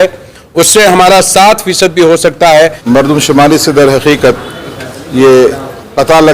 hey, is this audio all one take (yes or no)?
no